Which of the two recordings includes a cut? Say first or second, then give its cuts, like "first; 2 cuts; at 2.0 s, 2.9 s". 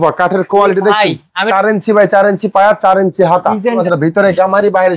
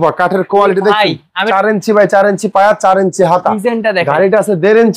first; 1 cut; at 3.8 s